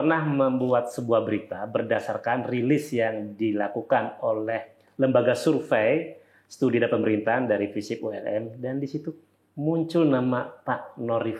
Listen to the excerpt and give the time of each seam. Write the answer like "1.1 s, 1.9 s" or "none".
none